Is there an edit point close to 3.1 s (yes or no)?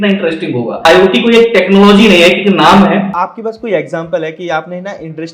yes